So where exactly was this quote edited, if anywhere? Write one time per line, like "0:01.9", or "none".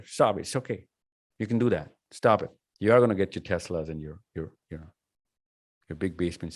0:02.6